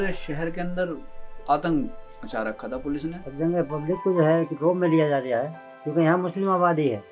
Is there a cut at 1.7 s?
no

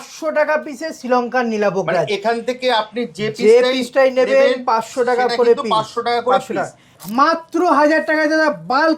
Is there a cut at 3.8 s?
no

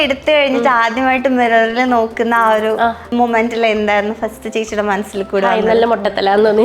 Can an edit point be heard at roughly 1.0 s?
no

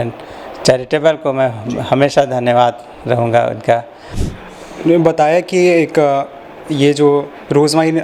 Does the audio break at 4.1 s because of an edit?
yes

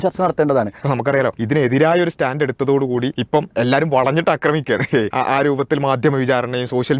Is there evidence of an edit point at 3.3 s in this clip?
yes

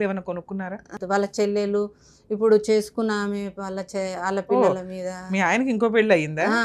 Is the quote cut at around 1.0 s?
yes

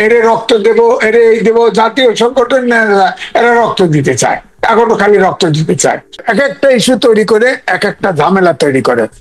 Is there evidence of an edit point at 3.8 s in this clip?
no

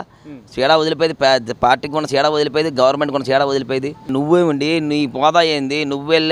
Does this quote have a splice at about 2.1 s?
no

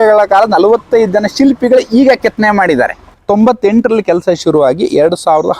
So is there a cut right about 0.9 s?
no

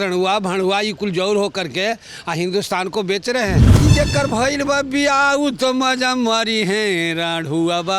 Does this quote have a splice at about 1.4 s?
no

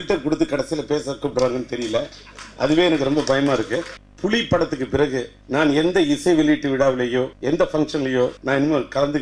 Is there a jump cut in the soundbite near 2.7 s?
no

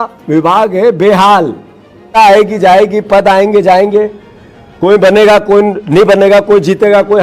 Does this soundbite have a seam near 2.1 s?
yes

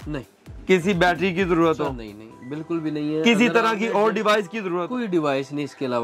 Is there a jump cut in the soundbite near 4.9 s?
yes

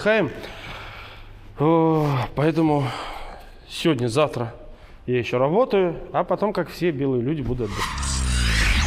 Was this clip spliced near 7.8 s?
yes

